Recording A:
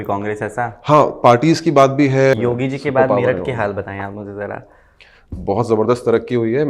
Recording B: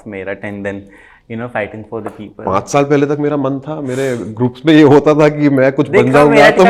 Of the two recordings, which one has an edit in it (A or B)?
A